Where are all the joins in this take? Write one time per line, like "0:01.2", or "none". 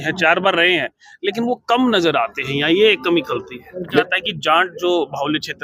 0:04.0